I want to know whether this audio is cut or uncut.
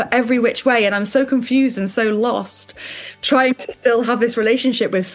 uncut